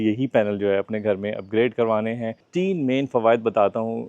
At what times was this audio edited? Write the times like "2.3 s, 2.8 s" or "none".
2.4 s